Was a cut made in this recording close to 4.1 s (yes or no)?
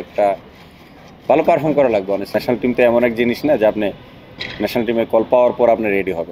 no